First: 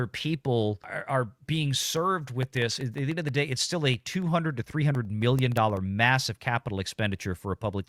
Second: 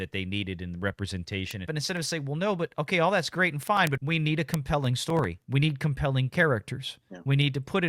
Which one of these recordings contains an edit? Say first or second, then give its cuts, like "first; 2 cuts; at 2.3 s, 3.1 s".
second; 3 cuts; at 1.7 s, 4.0 s, 5.4 s